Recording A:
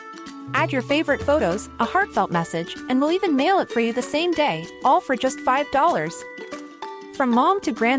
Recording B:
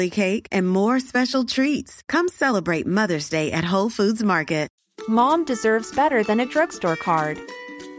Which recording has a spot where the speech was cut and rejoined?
B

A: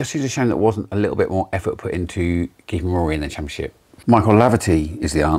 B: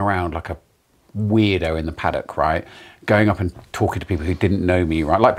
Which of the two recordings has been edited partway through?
A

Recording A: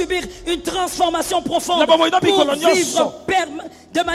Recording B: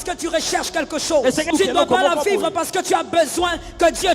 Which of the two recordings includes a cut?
B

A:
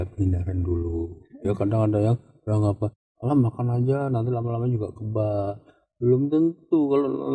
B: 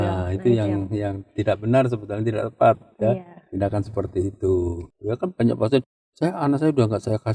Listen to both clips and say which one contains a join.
B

